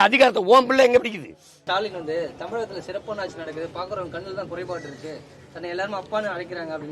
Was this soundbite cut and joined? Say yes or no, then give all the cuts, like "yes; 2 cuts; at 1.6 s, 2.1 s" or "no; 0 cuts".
yes; 1 cut; at 1.6 s